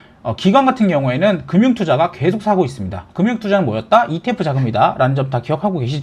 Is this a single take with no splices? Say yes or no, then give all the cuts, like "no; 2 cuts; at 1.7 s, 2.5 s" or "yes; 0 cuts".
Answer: yes; 0 cuts